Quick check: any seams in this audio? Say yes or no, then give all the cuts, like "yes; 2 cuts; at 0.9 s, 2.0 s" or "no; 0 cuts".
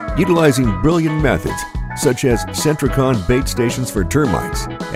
no; 0 cuts